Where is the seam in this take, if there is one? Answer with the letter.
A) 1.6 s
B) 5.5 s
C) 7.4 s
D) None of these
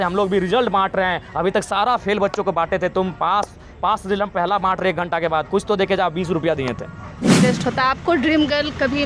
C